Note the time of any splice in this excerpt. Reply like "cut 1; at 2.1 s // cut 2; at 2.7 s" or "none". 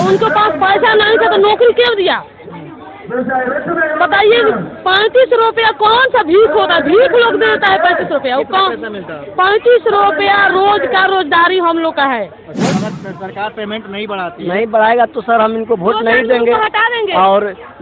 cut 1; at 12.7 s